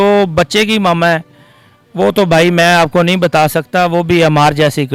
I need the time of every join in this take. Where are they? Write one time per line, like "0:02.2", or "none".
none